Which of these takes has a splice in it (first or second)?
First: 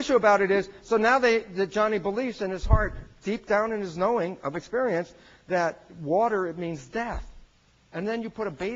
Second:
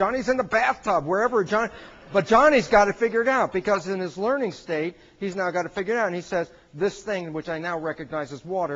first